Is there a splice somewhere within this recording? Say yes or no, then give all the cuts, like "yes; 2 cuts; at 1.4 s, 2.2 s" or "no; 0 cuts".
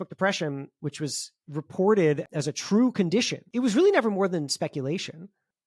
yes; 2 cuts; at 2.3 s, 3.4 s